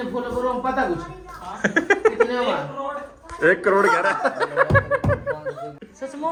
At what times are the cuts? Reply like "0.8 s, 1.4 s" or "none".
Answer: none